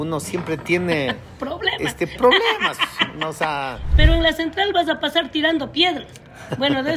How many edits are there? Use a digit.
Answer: 1